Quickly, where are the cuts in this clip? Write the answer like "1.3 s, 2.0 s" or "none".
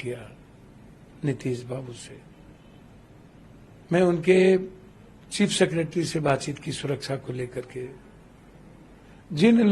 none

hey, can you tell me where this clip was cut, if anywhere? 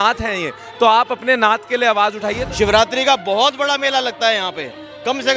2.4 s

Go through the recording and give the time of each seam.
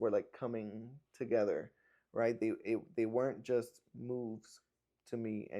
none

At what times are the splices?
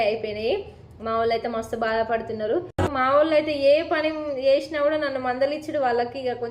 2.9 s

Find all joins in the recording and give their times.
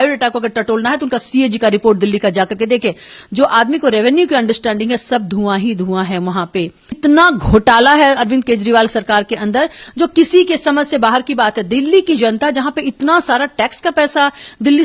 7.0 s

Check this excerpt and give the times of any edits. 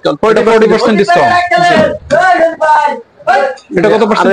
none

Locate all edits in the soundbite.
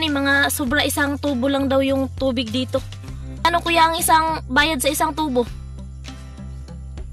3.4 s, 5.5 s

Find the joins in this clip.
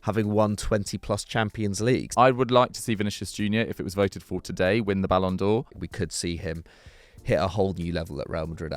2.1 s, 5.8 s

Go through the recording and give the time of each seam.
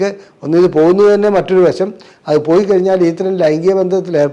none

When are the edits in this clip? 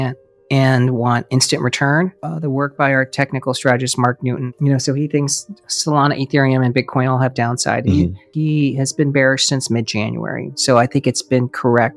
8.2 s

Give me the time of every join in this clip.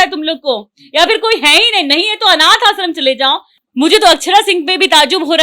3.6 s

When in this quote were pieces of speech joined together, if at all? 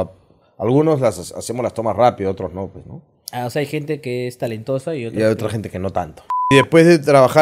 6.5 s

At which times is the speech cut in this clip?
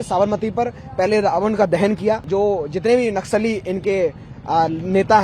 2.2 s

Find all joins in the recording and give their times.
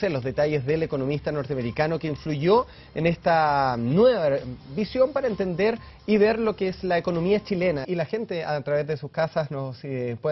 none

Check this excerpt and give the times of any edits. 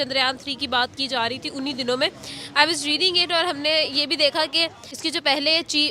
4.8 s

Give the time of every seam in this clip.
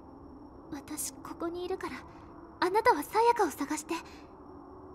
4.1 s

